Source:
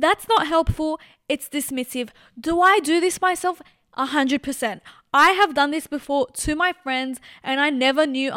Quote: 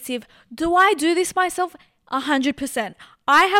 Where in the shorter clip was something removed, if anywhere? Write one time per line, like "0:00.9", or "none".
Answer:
none